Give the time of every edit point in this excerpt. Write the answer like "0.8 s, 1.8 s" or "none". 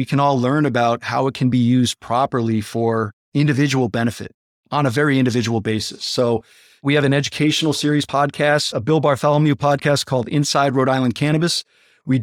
6.8 s, 8.2 s

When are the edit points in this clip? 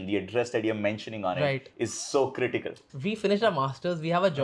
2.9 s

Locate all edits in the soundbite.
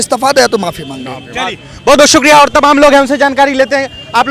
none

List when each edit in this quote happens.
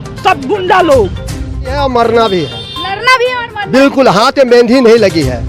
1.6 s

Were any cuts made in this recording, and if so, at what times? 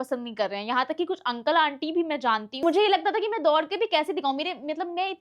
2.6 s

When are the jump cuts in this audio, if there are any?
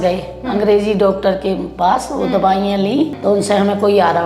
3.1 s

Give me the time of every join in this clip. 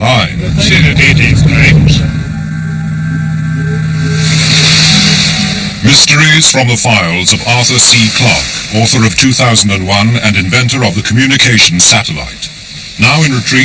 11.6 s

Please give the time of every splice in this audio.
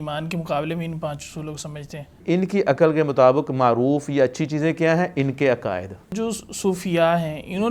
2.2 s, 6.1 s

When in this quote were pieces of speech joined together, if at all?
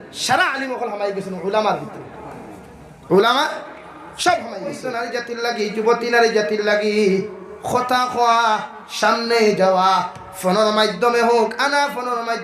4.9 s

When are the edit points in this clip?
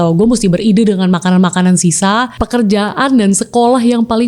2.3 s

